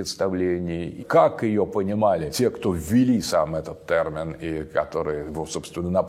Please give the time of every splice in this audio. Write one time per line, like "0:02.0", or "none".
0:00.9
0:02.3
0:05.3